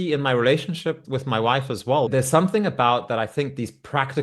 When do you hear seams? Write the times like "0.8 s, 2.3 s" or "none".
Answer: 1.0 s, 2.1 s